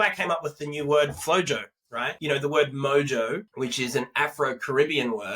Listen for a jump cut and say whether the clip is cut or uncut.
cut